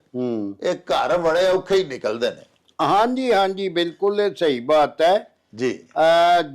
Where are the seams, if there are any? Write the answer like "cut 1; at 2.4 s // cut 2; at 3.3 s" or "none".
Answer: none